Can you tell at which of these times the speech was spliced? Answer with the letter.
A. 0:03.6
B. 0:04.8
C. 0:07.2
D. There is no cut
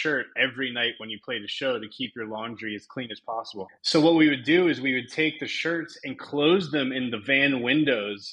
A